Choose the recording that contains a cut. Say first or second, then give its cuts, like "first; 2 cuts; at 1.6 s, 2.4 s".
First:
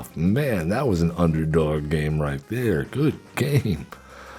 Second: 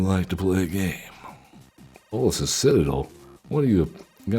second; 1 cut; at 2.1 s